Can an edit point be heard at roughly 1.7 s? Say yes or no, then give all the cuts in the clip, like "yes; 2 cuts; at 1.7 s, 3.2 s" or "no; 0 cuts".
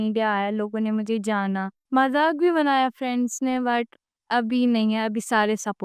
yes; 1 cut; at 1.7 s